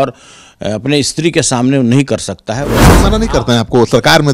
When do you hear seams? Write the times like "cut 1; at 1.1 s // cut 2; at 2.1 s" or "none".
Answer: cut 1; at 2.9 s